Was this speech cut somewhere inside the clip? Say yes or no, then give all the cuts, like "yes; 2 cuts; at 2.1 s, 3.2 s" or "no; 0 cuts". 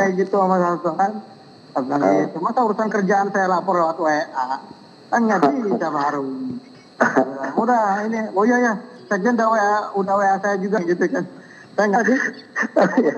yes; 2 cuts; at 10.8 s, 12.0 s